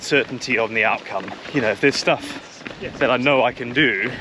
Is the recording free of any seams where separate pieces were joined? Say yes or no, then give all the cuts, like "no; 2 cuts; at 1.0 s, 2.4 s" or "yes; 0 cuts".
no; 1 cut; at 1.4 s